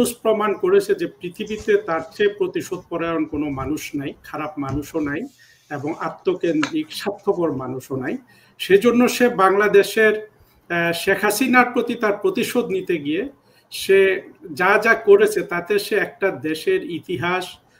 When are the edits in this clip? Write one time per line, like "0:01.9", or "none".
none